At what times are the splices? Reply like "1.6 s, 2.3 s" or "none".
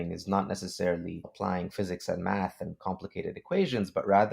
1.3 s